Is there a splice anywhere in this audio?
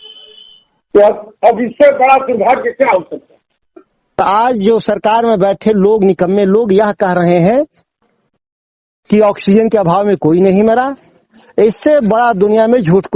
yes; 1 cut; at 4.2 s

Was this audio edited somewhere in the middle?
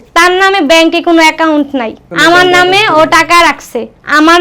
no; 0 cuts

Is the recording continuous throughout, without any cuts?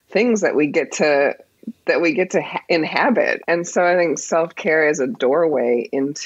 no; 1 cut; at 3.4 s

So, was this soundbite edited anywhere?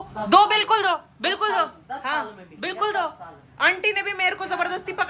no; 0 cuts

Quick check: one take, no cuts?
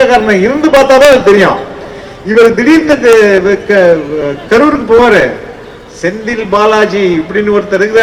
yes; 0 cuts

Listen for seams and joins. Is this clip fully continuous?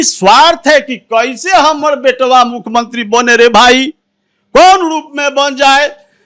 yes; 0 cuts

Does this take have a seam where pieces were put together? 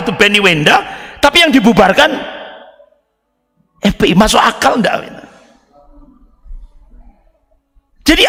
no; 0 cuts

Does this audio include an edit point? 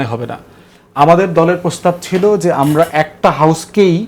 no; 0 cuts

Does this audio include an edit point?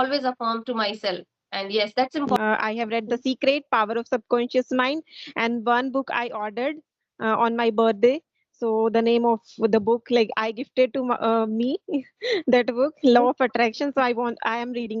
yes; 1 cut; at 2.4 s

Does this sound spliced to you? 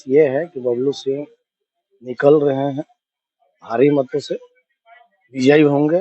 no; 0 cuts

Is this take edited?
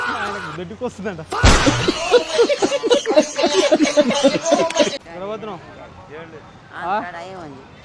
no; 0 cuts

